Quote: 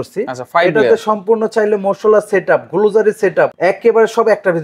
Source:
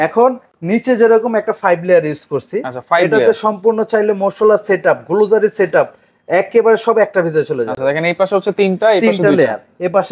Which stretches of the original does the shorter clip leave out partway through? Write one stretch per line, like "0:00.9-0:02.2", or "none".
0:05.9-0:06.2